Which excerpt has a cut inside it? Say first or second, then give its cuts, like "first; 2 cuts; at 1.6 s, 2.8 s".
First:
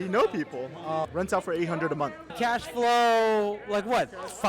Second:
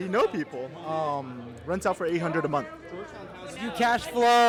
first; 2 cuts; at 1.1 s, 2.3 s